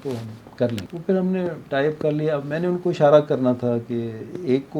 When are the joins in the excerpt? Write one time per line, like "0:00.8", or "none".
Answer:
0:00.9